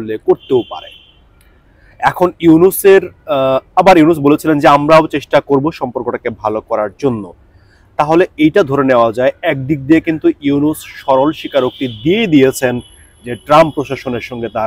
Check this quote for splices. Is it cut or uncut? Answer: uncut